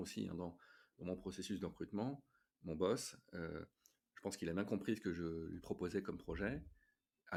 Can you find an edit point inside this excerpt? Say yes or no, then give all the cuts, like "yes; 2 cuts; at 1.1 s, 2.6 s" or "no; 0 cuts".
no; 0 cuts